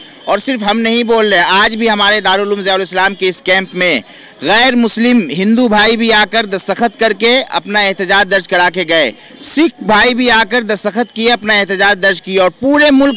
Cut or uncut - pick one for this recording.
uncut